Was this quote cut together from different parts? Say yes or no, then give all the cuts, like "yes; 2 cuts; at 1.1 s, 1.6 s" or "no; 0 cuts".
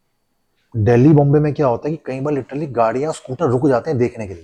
no; 0 cuts